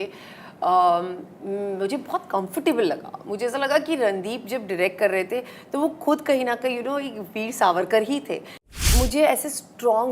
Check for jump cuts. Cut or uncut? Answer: cut